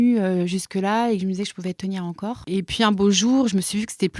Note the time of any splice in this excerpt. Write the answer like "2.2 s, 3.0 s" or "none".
2.4 s